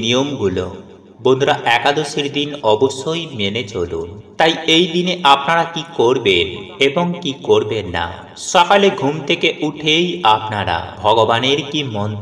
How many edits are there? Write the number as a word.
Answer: zero